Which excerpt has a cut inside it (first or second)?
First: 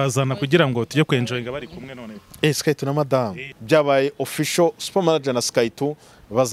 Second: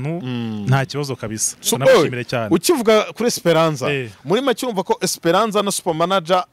first